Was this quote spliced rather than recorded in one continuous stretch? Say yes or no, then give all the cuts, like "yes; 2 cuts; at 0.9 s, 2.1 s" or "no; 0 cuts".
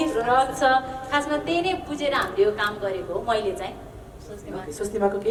no; 0 cuts